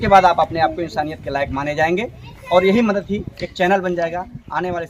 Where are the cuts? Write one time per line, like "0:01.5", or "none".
none

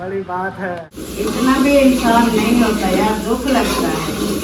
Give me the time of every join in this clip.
0:01.0

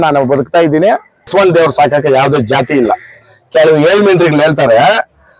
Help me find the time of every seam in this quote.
0:01.3

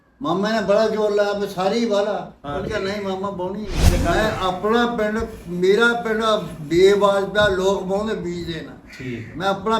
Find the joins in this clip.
0:03.8

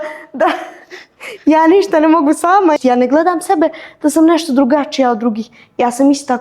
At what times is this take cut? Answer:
0:02.8

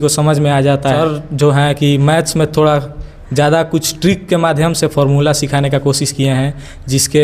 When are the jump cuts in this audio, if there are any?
0:01.0

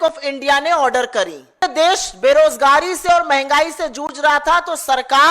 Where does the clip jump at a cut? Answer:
0:01.6

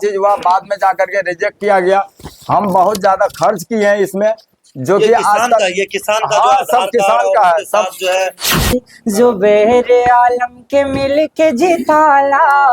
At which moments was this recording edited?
0:08.7

